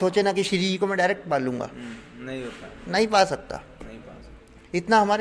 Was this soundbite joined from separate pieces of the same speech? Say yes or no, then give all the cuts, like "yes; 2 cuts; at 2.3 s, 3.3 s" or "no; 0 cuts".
no; 0 cuts